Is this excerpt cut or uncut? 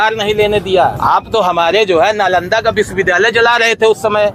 cut